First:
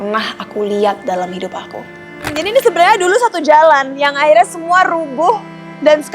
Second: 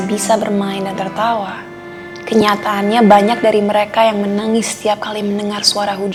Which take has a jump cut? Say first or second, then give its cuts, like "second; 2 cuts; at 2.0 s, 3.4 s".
first; 1 cut; at 2.3 s